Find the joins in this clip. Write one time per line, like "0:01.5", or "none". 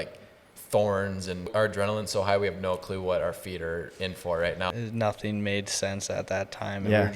0:01.5
0:04.7